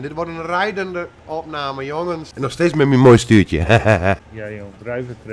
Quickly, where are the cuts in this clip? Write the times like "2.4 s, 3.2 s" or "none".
2.3 s, 4.3 s